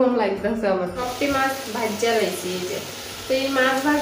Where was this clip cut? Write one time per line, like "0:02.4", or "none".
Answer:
0:01.0